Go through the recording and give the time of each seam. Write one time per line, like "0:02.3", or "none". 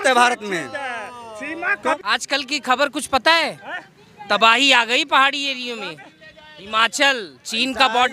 0:02.0